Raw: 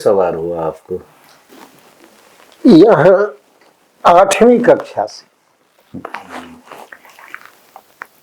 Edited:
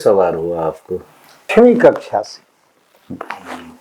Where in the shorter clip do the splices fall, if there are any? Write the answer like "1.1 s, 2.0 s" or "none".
1.5 s